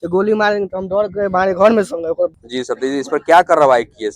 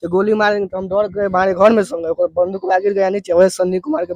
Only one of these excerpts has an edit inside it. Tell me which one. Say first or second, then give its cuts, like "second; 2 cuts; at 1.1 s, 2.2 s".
first; 1 cut; at 2.3 s